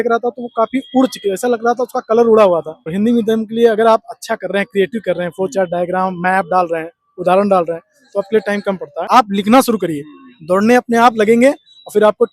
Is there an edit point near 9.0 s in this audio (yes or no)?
yes